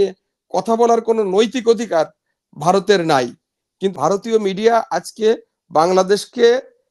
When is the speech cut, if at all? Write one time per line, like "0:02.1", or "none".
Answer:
0:03.9